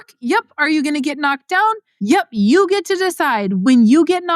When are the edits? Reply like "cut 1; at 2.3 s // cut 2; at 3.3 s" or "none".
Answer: cut 1; at 1.9 s // cut 2; at 3.6 s